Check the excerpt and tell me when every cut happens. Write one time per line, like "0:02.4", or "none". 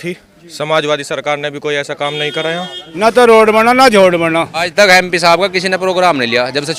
0:02.8
0:04.7